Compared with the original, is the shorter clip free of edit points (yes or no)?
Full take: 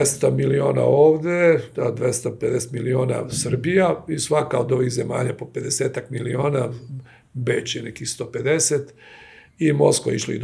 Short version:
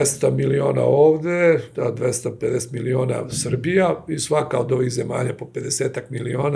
yes